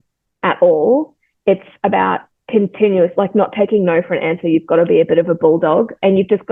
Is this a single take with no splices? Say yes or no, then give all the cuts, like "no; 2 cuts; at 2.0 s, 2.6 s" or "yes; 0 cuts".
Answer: yes; 0 cuts